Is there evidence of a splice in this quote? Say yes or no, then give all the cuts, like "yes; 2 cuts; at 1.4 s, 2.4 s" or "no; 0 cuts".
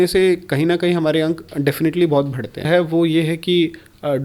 yes; 1 cut; at 2.6 s